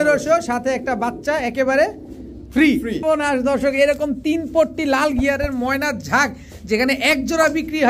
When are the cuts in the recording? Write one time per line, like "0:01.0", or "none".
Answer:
0:03.0

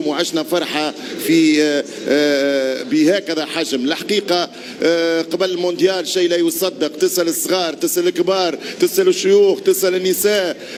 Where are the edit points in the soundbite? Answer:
none

